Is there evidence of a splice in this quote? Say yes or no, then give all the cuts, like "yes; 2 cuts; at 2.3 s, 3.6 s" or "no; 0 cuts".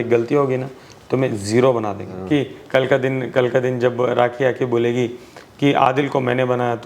yes; 1 cut; at 2.1 s